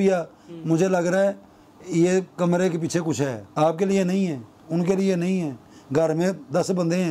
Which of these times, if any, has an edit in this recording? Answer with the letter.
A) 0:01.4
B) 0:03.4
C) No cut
B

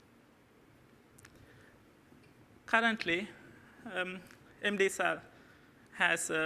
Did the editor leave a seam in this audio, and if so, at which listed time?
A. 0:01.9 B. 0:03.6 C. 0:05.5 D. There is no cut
B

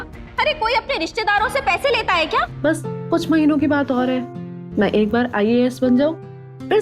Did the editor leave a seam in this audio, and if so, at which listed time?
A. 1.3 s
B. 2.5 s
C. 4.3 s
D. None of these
B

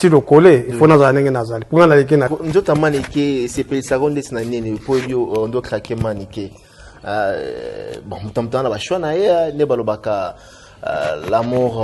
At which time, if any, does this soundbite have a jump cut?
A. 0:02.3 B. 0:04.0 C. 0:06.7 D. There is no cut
A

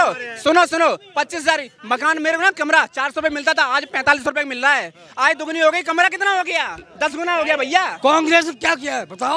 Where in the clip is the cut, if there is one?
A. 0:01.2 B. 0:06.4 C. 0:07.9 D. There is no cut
C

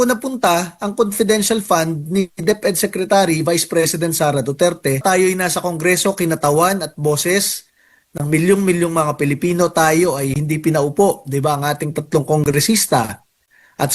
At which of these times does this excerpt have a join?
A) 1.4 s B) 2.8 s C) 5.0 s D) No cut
C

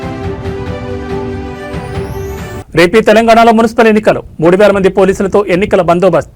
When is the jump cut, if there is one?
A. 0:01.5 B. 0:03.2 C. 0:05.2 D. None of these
A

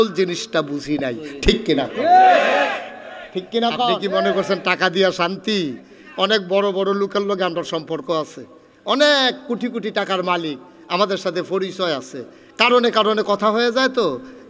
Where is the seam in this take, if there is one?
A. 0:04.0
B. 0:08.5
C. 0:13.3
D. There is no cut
A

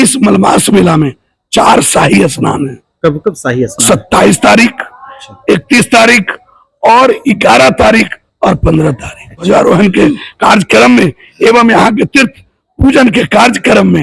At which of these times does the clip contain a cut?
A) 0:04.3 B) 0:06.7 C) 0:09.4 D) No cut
C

